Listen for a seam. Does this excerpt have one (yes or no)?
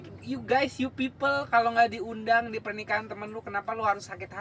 no